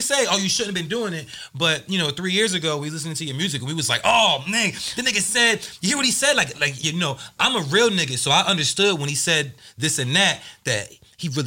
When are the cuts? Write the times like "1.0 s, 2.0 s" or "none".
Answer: none